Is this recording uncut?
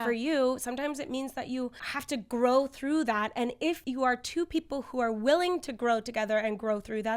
no; 2 cuts; at 1.9 s, 3.8 s

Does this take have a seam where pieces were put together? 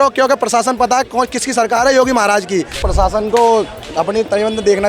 yes; 1 cut; at 2.9 s

